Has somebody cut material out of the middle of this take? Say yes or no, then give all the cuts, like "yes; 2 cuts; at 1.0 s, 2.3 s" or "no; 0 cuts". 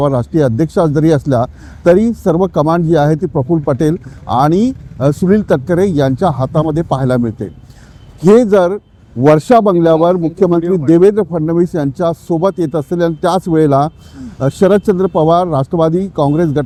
no; 0 cuts